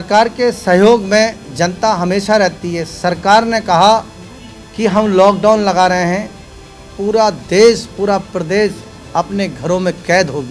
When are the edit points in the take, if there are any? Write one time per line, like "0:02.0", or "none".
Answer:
none